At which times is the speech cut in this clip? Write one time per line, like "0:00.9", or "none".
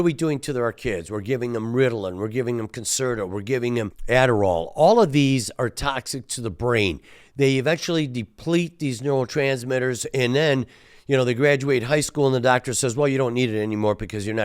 0:04.0